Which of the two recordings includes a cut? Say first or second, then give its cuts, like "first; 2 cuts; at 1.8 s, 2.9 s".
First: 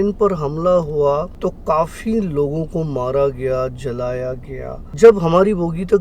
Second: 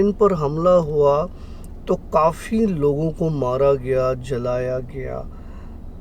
first; 2 cuts; at 1.3 s, 4.8 s